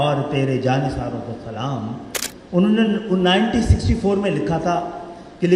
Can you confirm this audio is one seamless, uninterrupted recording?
yes; 0 cuts

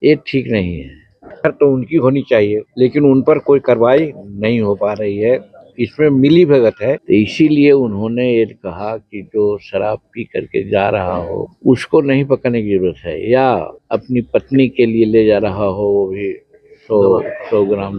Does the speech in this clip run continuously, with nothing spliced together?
no; 5 cuts; at 1.3 s, 2.7 s, 7.0 s, 11.5 s, 13.7 s

